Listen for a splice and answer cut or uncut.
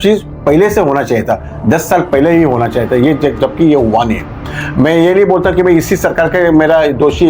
uncut